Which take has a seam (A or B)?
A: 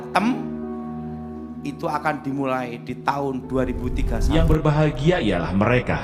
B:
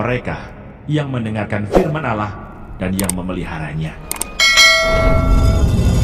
A